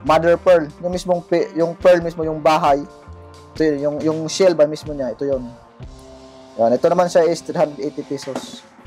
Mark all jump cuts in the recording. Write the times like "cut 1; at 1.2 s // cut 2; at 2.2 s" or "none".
none